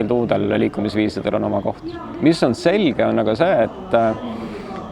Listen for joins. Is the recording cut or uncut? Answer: uncut